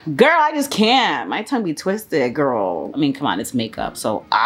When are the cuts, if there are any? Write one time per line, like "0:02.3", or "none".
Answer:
0:02.9